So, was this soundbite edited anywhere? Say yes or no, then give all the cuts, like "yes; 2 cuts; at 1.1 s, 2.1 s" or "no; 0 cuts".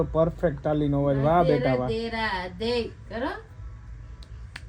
no; 0 cuts